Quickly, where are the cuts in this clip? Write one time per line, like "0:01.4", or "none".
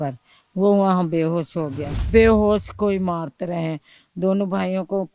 0:02.1